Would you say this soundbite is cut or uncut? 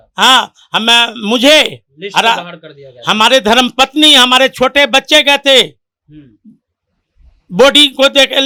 uncut